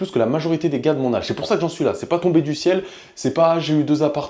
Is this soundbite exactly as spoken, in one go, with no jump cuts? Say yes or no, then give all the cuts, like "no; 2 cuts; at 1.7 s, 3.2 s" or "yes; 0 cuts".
yes; 0 cuts